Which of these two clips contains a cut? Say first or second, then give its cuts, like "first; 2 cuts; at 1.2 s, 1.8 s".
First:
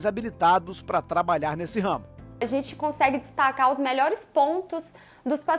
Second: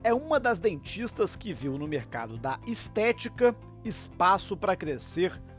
first; 1 cut; at 2.4 s